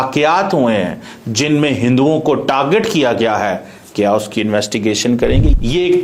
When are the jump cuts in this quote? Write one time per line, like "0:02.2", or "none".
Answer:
none